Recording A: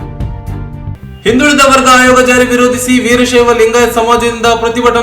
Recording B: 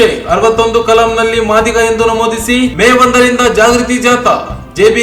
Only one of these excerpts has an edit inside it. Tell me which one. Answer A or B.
A